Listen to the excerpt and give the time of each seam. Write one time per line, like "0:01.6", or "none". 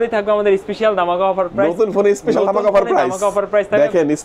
none